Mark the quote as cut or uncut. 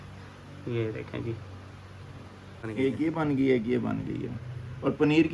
cut